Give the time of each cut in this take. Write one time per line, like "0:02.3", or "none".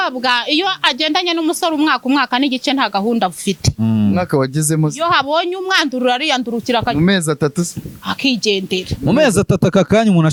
none